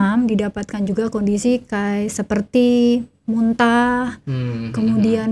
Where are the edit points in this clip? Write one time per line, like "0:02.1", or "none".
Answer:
none